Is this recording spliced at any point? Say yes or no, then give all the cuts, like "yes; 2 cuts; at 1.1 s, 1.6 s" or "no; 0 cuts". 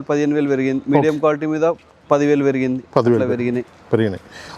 no; 0 cuts